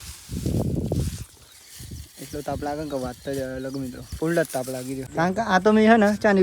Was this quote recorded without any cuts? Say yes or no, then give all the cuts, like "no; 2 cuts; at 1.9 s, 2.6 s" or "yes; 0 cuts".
no; 1 cut; at 5.0 s